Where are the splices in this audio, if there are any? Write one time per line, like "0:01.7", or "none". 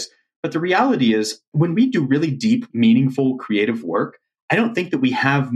0:01.4
0:02.7